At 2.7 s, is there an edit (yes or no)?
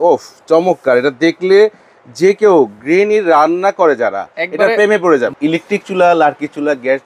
no